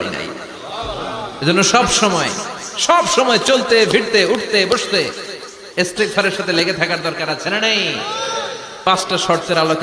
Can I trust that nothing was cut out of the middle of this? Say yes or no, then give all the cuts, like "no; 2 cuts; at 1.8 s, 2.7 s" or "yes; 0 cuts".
no; 1 cut; at 8.8 s